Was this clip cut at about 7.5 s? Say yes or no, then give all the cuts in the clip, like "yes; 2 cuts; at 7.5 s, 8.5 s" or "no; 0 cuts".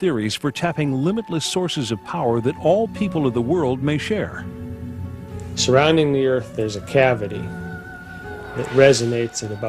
yes; 1 cut; at 7.5 s